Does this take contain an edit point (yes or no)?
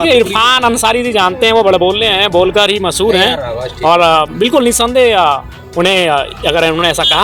no